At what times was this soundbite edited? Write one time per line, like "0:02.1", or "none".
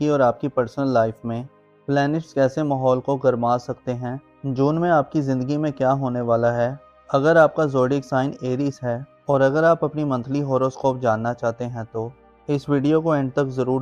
none

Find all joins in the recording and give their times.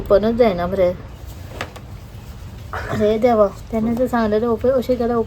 0:01.1
0:03.6

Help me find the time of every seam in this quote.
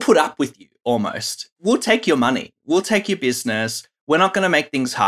0:01.5

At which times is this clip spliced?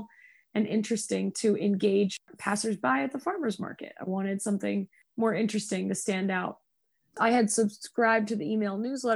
0:02.3

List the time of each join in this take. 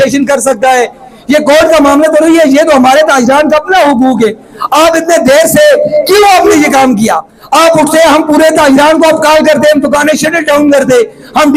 none

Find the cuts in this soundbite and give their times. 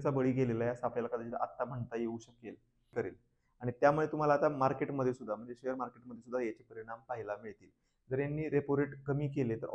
0:02.9

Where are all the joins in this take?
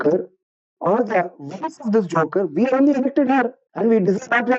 0:03.6

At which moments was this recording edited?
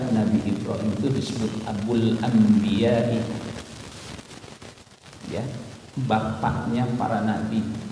none

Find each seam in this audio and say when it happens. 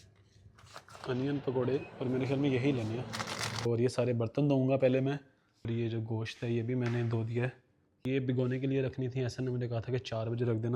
0:03.6
0:05.6
0:08.0

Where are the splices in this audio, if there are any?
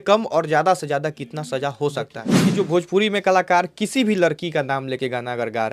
0:02.2

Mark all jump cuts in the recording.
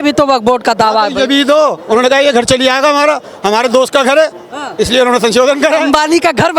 none

